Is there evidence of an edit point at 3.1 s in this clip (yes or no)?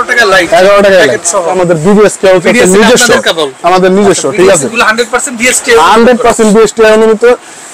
no